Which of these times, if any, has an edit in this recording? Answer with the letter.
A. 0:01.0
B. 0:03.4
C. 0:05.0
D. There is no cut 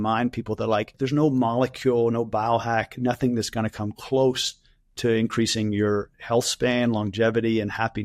A